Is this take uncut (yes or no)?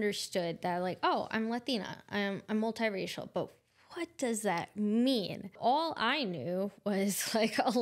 no